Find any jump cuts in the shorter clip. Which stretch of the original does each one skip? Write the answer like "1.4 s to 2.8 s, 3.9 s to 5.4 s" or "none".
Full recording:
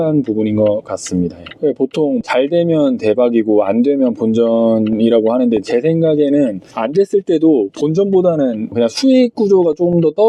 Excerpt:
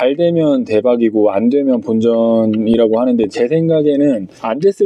none

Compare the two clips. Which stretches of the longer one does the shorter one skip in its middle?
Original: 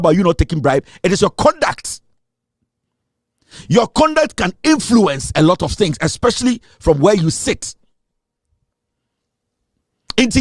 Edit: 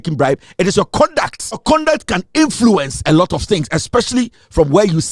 2.0 s to 3.9 s

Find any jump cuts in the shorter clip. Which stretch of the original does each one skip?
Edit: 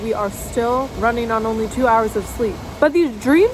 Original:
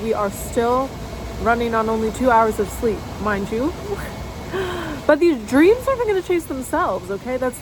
0.9 s to 1.4 s, 3.1 s to 4.9 s

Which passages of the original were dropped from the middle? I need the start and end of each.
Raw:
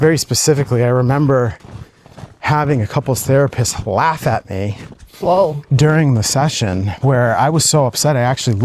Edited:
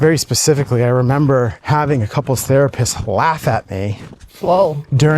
1.6 s to 2.4 s

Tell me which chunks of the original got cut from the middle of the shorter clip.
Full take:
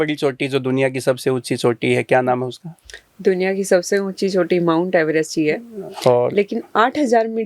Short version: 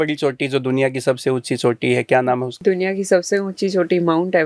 2.5 s to 3.1 s

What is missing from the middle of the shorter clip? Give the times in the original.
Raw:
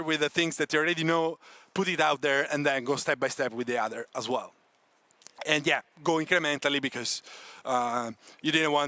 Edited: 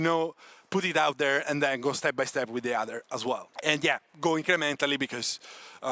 4.5 s to 5.3 s

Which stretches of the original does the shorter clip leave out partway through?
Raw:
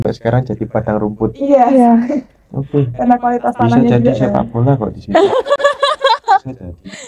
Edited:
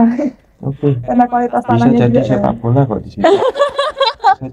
5.5 s to 5.7 s

